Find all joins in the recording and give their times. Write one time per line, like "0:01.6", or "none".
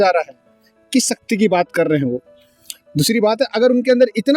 none

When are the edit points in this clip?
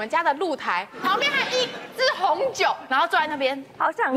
0:00.9

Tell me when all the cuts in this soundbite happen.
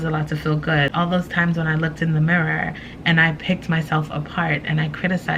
0:00.9

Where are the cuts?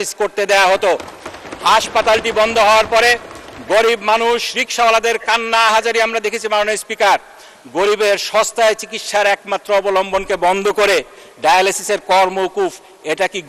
none

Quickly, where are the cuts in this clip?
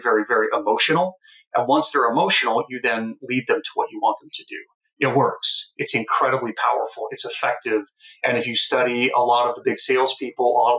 none

